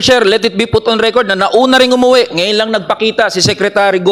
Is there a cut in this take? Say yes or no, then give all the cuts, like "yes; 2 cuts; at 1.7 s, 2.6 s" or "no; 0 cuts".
no; 0 cuts